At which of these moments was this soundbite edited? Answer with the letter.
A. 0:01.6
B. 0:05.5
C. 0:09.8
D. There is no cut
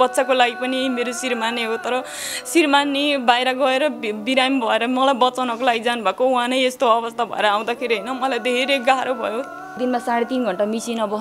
C